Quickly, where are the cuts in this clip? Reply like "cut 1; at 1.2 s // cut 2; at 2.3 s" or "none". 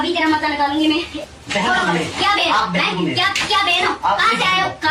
cut 1; at 1.1 s

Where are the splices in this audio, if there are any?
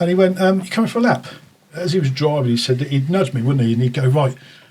cut 1; at 1.7 s

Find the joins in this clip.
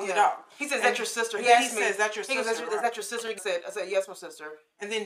cut 1; at 3.4 s

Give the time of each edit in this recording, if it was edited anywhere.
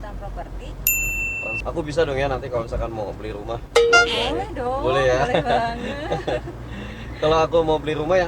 cut 1; at 1.6 s

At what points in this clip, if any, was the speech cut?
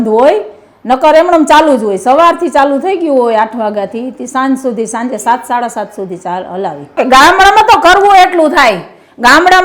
cut 1; at 7.0 s

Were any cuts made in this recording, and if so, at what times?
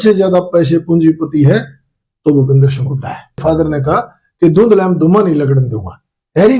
cut 1; at 3.4 s

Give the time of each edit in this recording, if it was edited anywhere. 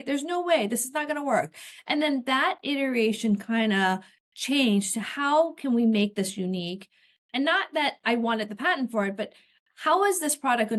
none

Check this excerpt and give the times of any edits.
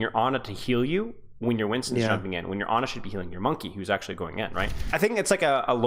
cut 1; at 4.9 s

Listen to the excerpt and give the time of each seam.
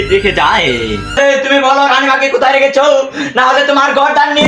cut 1; at 1.2 s

